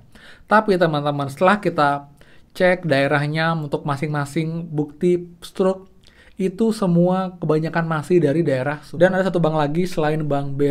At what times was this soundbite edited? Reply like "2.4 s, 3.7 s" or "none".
8.8 s